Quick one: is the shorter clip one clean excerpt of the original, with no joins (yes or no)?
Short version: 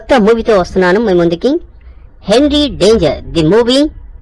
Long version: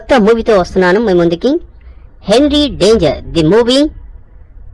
yes